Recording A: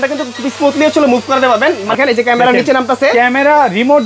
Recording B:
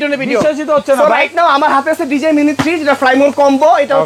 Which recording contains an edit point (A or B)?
A